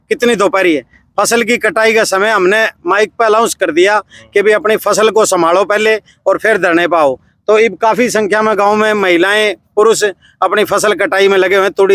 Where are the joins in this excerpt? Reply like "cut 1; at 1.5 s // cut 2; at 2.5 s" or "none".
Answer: none